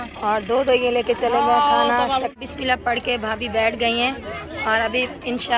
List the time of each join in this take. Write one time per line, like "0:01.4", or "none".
0:02.3